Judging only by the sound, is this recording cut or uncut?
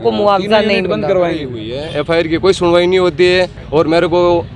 cut